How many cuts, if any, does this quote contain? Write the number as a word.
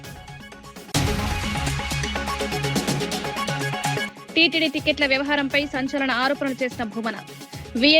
three